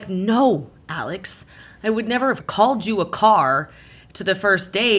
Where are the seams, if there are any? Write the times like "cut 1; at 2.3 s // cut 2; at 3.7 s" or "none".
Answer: cut 1; at 2.4 s